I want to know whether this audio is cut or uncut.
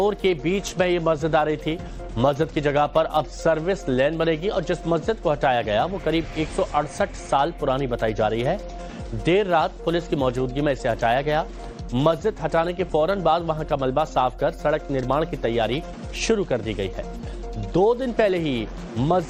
uncut